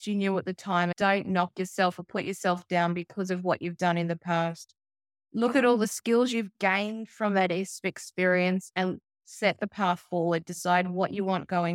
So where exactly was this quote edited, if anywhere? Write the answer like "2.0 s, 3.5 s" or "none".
0.9 s